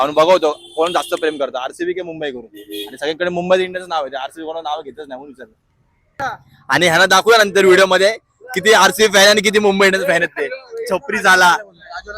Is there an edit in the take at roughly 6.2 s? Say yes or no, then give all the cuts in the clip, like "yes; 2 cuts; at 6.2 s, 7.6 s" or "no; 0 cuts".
yes; 1 cut; at 6.2 s